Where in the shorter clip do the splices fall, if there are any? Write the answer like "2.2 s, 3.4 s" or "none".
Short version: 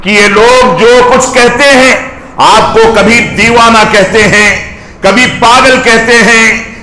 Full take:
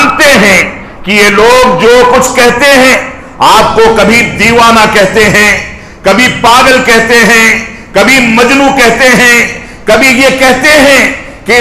none